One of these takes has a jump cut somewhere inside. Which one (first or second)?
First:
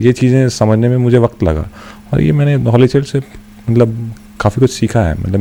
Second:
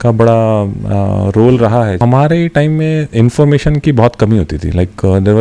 second